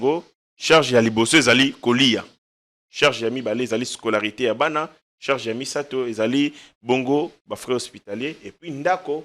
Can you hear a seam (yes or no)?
no